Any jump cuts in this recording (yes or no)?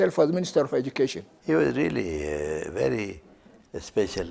yes